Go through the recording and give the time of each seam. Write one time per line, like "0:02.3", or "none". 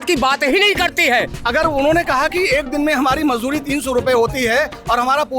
0:01.4